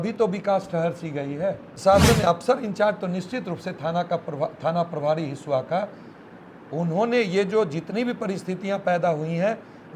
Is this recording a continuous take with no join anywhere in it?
no; 1 cut; at 1.7 s

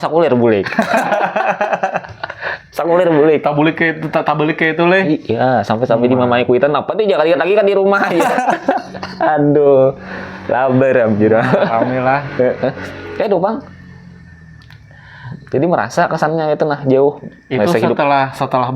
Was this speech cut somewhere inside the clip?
no; 0 cuts

